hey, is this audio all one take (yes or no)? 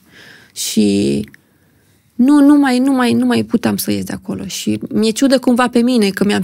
yes